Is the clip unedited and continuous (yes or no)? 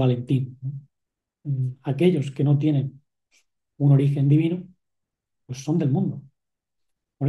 yes